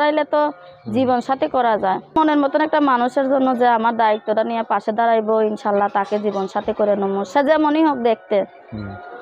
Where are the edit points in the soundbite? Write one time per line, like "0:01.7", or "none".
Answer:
0:02.2